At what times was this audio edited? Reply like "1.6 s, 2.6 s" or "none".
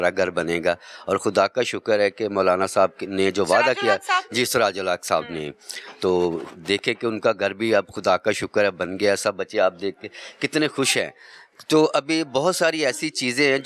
none